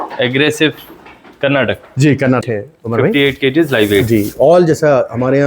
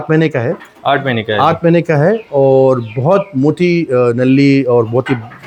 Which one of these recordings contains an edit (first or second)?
first